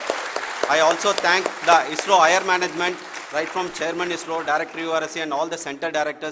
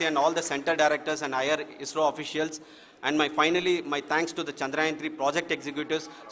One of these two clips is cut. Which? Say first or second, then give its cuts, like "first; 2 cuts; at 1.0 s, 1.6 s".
second; 1 cut; at 2.2 s